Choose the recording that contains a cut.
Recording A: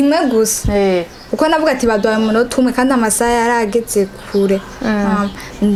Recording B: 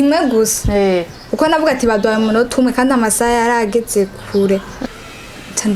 B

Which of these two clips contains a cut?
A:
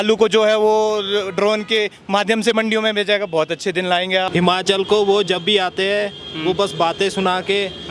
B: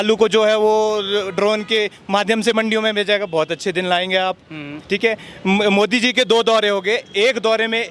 A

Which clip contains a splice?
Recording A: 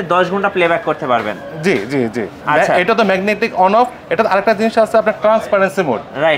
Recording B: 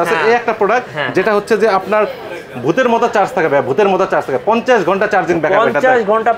A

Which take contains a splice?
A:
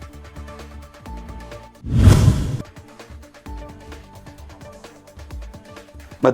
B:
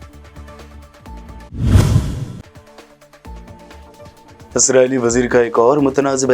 B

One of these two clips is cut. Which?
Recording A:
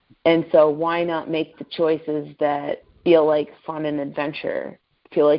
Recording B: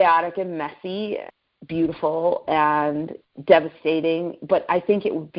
B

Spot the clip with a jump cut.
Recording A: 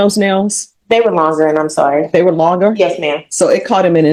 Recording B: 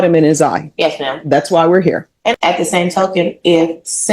B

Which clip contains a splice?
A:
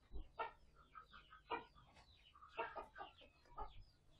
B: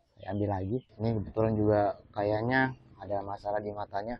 B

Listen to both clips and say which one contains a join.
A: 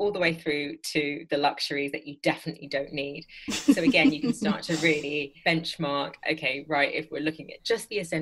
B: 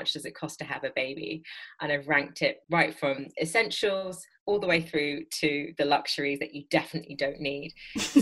B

